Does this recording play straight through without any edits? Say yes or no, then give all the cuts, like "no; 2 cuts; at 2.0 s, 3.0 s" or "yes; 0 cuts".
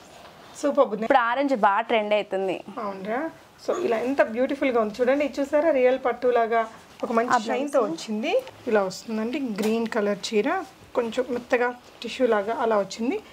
no; 2 cuts; at 1.0 s, 8.6 s